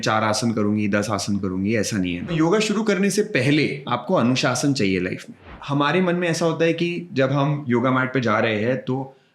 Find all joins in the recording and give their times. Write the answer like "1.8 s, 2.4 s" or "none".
2.3 s, 3.9 s, 5.5 s, 7.6 s

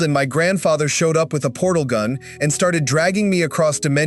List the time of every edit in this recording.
none

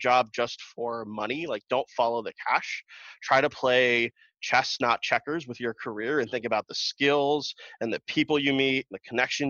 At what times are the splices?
none

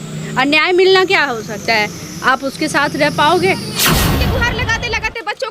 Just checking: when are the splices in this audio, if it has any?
4.1 s

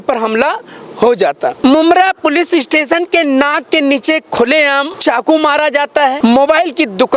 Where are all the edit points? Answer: 1.6 s, 4.9 s, 6.2 s

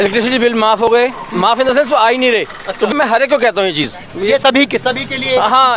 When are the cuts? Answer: 2.9 s

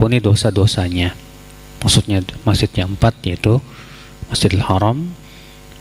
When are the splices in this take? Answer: none

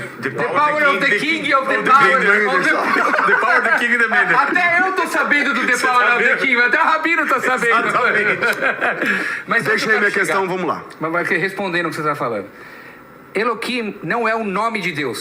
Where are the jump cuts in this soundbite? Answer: none

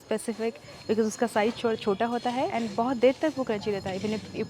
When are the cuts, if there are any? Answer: 2.5 s

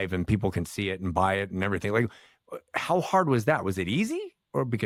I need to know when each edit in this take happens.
none

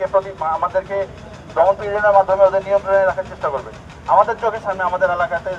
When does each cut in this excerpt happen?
none

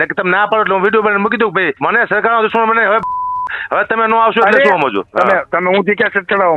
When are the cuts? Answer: 1.7 s, 5.0 s

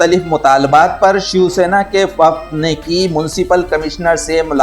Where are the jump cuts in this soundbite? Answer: none

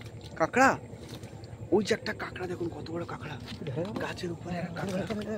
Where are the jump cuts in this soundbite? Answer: none

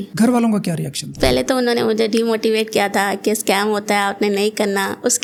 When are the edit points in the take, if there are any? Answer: none

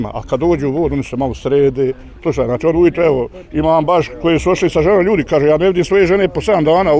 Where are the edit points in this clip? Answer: 2.1 s

